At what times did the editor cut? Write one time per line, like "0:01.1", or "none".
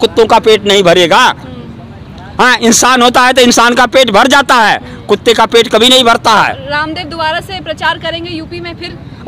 none